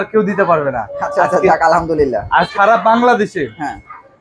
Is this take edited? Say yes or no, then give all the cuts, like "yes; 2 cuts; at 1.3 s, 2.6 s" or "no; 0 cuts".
yes; 1 cut; at 2.5 s